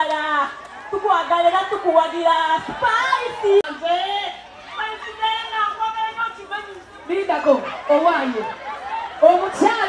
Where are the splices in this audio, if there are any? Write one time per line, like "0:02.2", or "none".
0:03.6